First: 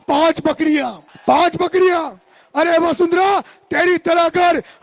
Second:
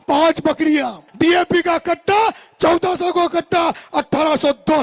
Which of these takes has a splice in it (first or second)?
second